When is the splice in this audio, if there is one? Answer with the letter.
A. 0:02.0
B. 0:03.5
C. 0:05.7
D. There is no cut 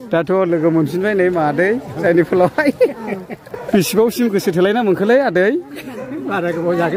B